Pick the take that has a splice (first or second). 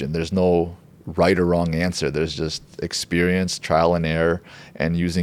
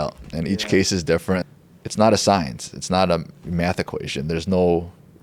second